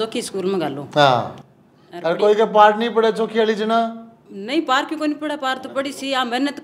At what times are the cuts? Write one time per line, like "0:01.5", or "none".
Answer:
none